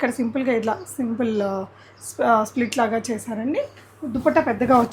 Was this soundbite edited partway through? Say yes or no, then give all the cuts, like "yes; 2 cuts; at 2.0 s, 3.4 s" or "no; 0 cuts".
no; 0 cuts